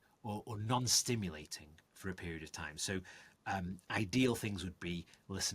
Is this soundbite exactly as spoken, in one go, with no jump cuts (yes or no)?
yes